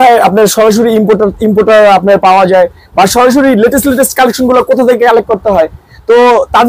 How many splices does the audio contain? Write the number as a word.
zero